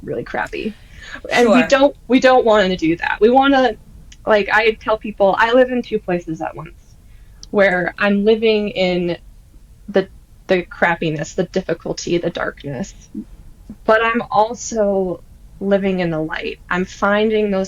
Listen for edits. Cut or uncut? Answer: uncut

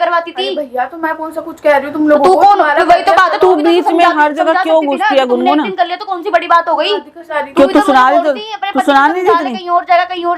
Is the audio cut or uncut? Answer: cut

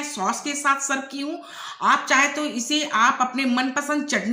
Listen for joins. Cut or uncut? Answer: uncut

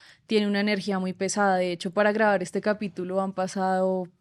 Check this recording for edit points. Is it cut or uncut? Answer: uncut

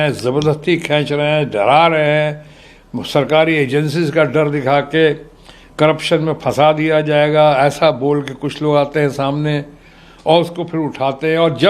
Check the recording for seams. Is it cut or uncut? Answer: uncut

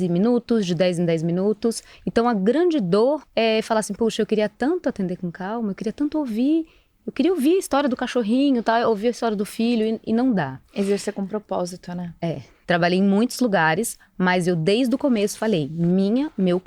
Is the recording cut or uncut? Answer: cut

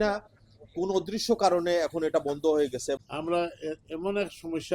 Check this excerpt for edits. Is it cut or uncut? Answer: cut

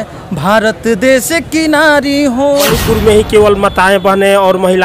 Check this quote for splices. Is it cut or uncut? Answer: cut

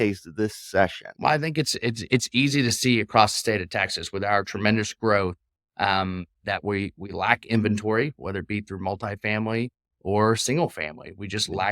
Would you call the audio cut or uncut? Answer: cut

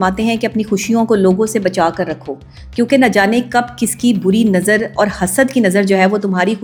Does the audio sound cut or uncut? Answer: uncut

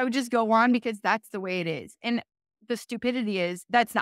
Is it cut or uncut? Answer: uncut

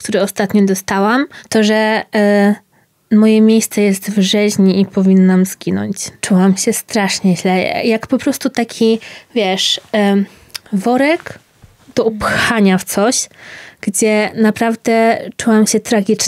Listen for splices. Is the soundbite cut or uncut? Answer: cut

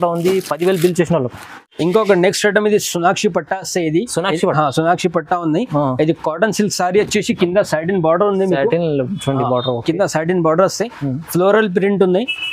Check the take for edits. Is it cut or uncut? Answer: uncut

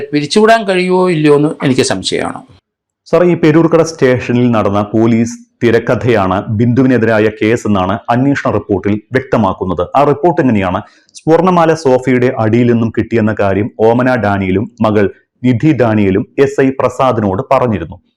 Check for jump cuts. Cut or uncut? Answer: uncut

